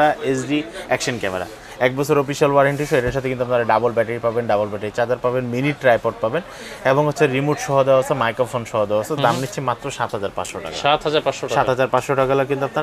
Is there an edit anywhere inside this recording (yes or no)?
no